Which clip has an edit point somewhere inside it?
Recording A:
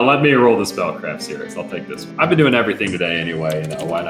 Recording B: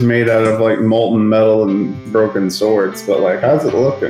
A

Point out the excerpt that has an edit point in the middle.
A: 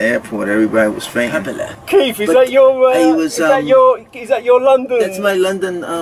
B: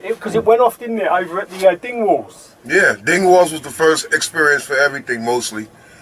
A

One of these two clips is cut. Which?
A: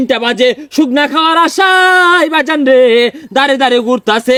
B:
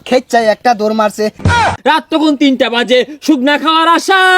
B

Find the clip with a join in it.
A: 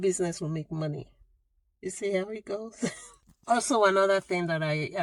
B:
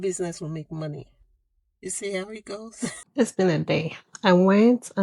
B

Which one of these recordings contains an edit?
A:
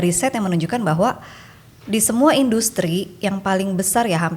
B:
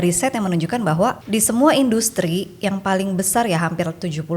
B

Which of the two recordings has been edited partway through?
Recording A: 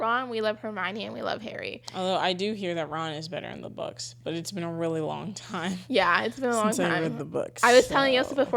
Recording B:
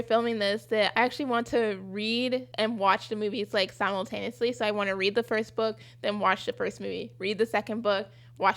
B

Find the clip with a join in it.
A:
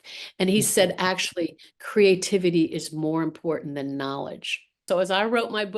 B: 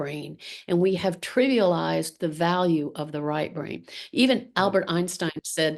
A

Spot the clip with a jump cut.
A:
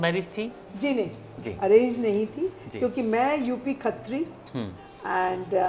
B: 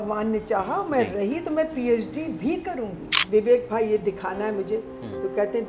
B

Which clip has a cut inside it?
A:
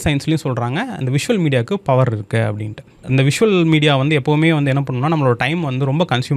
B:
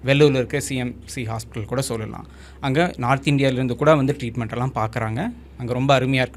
A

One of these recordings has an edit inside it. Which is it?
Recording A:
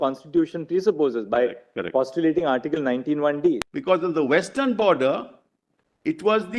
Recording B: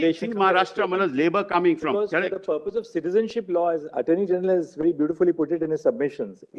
A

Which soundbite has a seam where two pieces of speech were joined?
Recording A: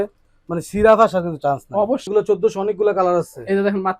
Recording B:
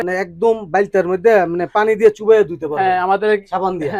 A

